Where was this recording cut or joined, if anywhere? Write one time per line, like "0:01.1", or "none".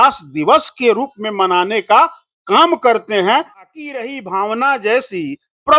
0:03.6